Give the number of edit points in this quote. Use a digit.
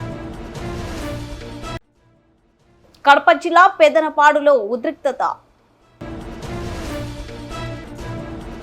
2